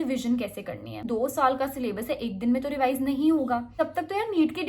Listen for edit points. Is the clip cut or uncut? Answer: cut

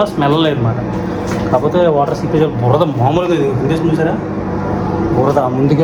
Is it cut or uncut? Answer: uncut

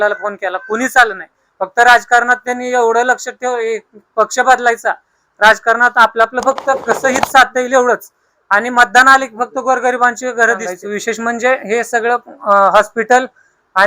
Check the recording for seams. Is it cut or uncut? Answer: cut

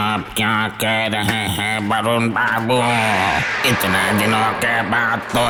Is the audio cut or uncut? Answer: uncut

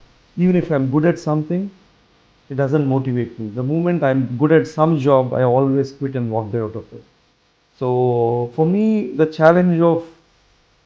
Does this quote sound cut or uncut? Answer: uncut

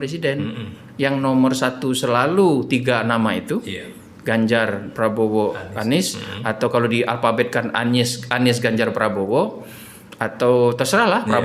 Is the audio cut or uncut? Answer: uncut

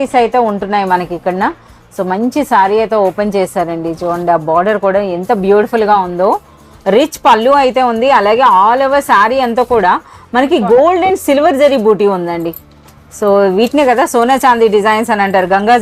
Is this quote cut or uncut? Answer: uncut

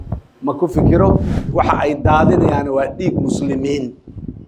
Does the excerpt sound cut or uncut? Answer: cut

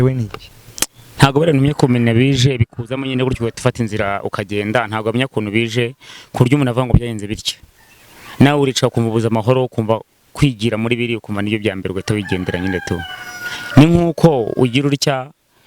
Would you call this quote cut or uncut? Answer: uncut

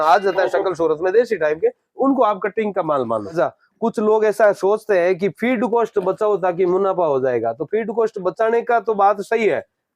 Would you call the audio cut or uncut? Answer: cut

